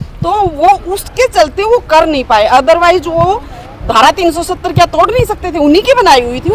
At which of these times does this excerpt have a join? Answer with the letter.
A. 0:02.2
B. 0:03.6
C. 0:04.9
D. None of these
D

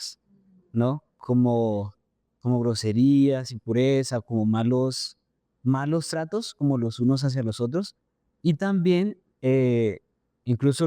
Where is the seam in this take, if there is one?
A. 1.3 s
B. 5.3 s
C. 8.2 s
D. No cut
D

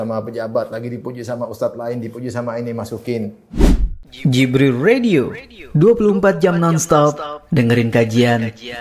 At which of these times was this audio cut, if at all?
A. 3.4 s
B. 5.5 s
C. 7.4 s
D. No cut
A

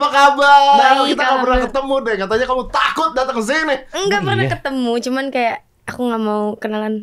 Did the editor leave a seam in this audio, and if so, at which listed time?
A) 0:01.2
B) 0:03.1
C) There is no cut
C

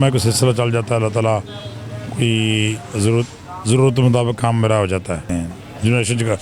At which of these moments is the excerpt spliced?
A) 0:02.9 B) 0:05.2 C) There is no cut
B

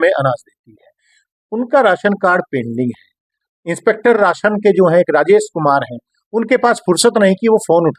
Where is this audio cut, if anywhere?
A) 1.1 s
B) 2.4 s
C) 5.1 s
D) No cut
D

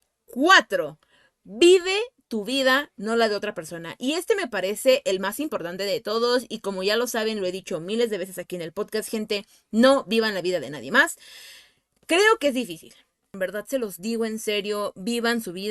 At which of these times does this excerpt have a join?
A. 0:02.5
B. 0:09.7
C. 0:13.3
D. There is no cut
C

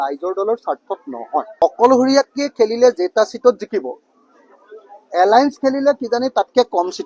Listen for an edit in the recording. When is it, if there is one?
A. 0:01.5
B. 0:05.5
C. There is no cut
A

